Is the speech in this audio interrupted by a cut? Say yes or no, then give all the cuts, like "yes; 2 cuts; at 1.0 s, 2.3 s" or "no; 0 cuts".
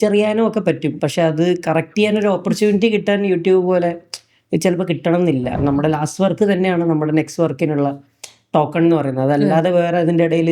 yes; 2 cuts; at 1.0 s, 5.6 s